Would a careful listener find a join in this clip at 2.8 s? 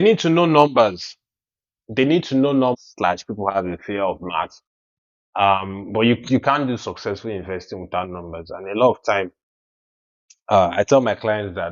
yes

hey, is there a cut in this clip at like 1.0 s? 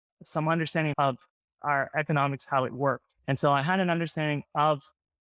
yes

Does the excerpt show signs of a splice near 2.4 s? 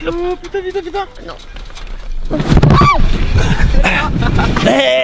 no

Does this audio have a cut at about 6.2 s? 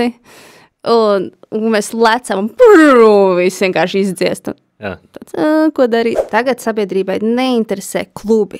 yes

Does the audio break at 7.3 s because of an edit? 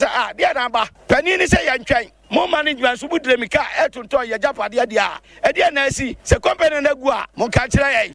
yes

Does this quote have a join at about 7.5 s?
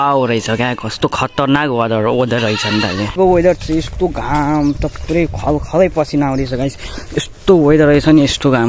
no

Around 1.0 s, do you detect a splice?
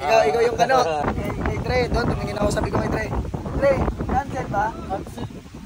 yes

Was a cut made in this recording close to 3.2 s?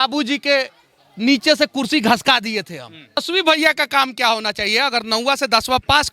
yes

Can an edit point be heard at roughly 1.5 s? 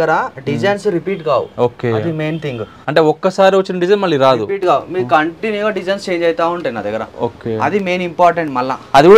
no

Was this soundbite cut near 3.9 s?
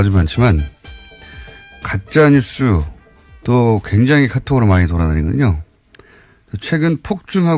yes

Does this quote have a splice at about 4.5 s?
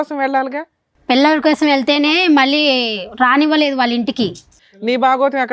yes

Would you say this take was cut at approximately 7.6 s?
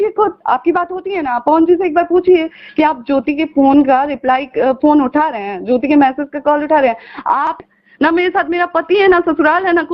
yes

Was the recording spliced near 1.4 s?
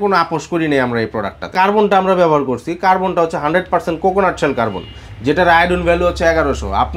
yes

